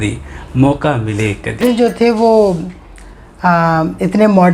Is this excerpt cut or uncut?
cut